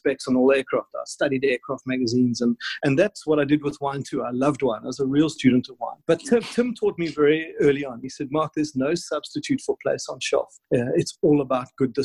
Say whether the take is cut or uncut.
cut